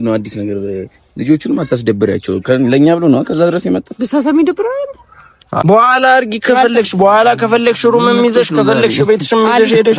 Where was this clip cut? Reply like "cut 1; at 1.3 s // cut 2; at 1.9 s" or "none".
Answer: cut 1; at 5.6 s